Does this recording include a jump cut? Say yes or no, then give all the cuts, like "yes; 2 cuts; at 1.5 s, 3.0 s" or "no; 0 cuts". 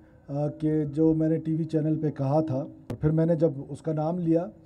yes; 1 cut; at 2.8 s